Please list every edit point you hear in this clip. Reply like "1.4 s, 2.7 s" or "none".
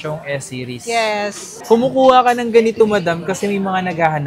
1.5 s